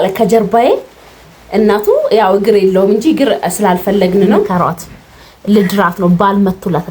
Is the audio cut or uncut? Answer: cut